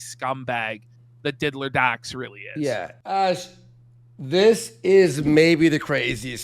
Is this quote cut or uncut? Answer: cut